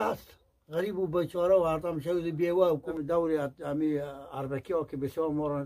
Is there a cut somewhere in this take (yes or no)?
yes